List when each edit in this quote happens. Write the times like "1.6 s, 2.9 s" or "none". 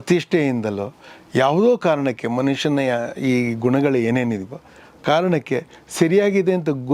none